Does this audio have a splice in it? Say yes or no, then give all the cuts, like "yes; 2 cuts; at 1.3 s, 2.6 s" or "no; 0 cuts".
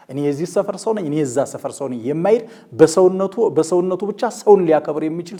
no; 0 cuts